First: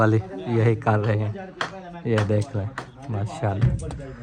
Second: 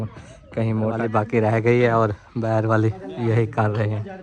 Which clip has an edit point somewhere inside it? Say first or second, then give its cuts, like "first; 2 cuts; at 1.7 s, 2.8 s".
second; 1 cut; at 1.0 s